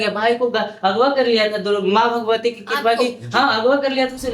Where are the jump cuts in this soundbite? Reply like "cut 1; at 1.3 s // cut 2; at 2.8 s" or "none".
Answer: none